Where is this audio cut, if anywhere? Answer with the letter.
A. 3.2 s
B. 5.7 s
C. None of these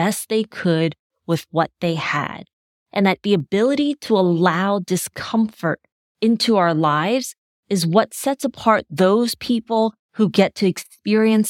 A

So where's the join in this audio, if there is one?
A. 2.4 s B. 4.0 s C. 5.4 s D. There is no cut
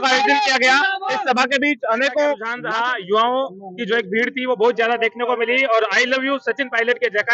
A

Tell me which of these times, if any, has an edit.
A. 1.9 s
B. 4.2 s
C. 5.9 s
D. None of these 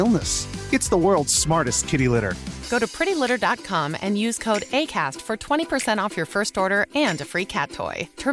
D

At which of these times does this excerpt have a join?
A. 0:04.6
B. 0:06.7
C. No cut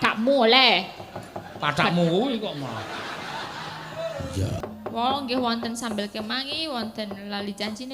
A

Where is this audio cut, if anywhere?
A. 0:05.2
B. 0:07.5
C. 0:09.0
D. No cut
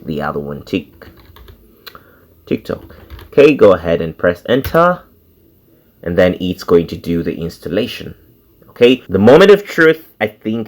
C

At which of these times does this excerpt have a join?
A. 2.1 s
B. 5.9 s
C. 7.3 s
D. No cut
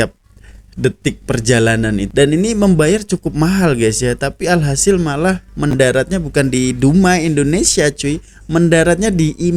A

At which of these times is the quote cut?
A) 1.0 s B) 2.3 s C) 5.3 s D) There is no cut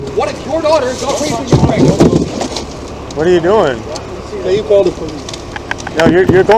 D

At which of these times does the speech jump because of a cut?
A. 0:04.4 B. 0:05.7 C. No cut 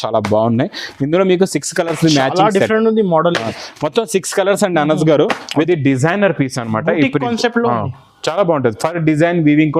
B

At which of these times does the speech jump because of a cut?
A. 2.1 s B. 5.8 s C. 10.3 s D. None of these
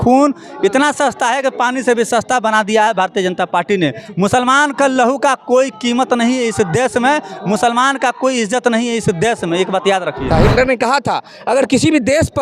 C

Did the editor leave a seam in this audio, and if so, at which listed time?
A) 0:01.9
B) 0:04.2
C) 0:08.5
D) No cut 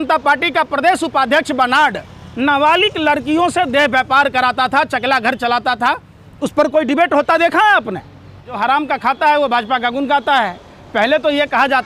C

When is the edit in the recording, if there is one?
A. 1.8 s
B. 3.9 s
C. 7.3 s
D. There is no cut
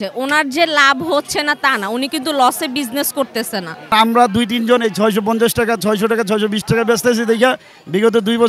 B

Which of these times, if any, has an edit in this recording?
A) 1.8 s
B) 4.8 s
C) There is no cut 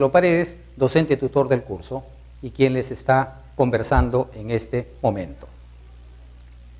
B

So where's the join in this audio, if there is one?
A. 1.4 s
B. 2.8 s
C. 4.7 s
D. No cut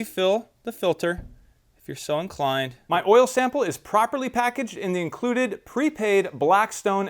B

